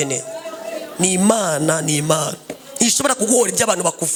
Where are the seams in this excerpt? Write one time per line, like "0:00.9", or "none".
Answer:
none